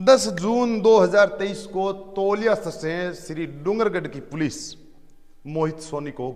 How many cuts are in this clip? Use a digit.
0